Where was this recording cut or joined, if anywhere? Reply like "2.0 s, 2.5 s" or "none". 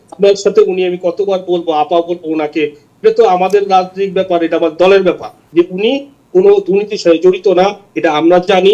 5.3 s